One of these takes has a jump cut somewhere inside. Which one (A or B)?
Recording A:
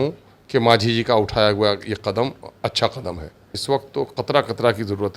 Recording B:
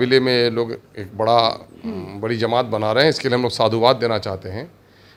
A